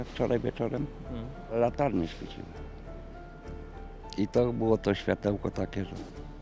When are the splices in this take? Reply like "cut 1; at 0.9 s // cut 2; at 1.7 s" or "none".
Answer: none

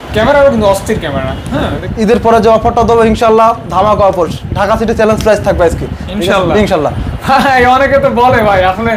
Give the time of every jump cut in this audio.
cut 1; at 1.8 s

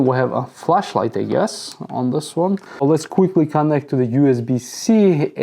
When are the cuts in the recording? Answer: cut 1; at 2.6 s

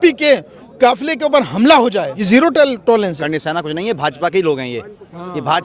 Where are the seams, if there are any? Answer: cut 1; at 2.1 s // cut 2; at 3.2 s

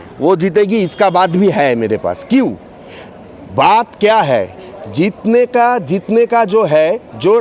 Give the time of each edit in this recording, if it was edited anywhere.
none

